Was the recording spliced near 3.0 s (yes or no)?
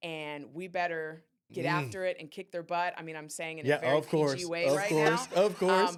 no